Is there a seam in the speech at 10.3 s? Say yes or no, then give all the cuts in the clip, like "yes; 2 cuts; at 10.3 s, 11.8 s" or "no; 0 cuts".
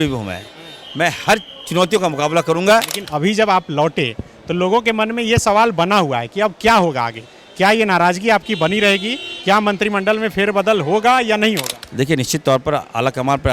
no; 2 cuts; at 3.0 s, 11.8 s